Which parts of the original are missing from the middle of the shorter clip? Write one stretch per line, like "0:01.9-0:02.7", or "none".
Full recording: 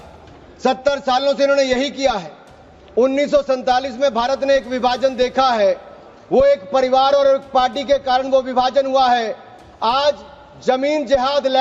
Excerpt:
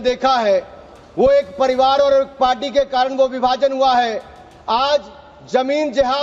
none